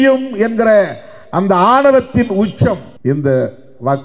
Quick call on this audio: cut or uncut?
cut